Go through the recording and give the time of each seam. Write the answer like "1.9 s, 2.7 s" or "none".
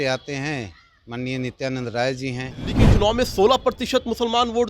2.9 s

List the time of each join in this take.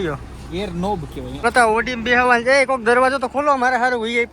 1.3 s

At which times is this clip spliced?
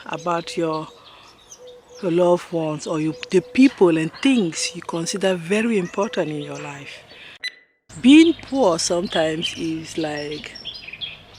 7.7 s

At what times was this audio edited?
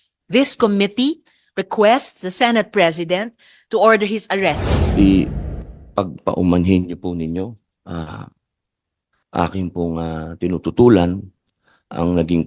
4.7 s

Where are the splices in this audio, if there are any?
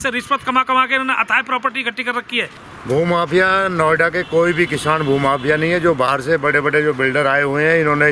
2.7 s

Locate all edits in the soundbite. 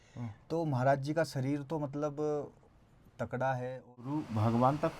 3.9 s

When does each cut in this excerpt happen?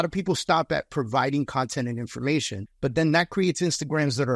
none

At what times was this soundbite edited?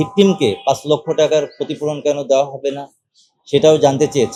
none

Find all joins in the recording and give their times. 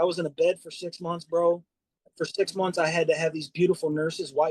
2.0 s

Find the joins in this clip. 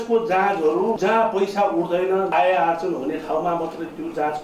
1.0 s, 2.3 s

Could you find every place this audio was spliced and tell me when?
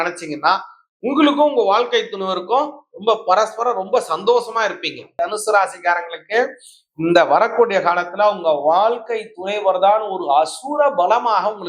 5.1 s

